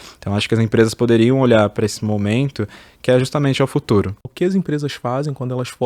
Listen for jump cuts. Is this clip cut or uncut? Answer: cut